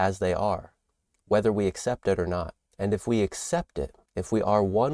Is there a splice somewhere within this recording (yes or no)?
yes